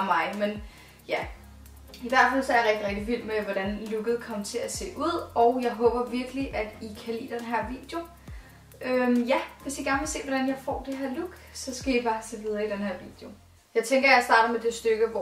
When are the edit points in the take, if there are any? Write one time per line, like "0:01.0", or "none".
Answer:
0:03.0